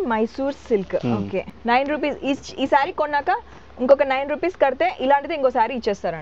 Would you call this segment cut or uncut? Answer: cut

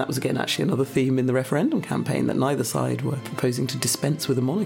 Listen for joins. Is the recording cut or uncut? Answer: cut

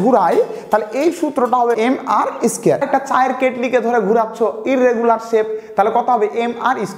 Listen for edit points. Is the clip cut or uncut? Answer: cut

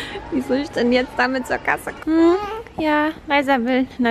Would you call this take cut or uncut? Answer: cut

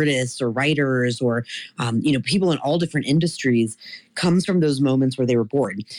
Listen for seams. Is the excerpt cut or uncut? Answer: uncut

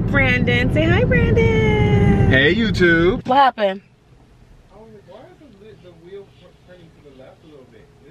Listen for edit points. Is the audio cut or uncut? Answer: cut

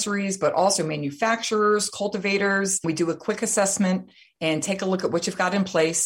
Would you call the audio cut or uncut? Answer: cut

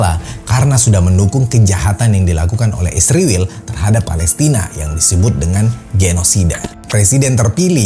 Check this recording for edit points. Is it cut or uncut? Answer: uncut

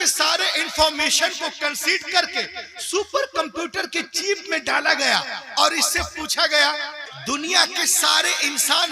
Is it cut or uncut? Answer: cut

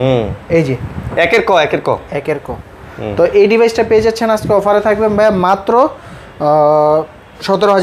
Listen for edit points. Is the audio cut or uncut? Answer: uncut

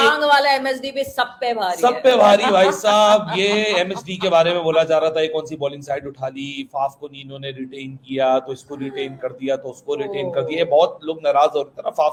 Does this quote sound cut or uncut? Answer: uncut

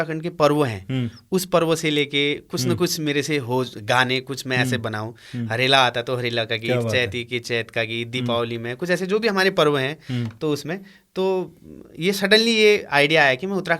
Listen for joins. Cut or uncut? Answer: uncut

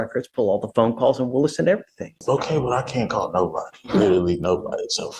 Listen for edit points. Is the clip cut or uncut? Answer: cut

